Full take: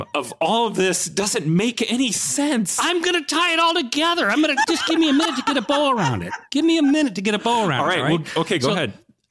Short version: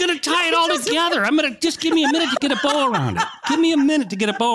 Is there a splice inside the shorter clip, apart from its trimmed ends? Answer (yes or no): no